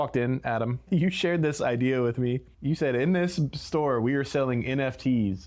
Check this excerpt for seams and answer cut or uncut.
cut